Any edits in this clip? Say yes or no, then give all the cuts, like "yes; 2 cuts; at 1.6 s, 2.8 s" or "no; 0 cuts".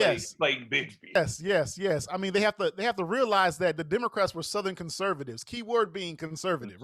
yes; 1 cut; at 1.1 s